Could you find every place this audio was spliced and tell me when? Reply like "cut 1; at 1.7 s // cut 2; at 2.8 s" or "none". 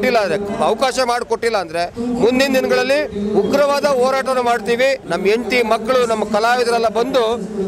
cut 1; at 5.1 s